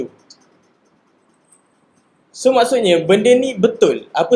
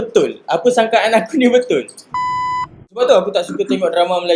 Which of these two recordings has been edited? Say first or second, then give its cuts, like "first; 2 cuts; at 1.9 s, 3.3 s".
second; 1 cut; at 2.6 s